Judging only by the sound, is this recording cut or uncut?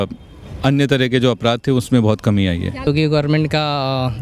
cut